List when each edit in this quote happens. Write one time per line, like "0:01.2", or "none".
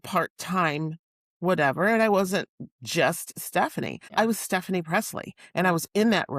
0:04.0